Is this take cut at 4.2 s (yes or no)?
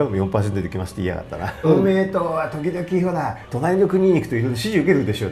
no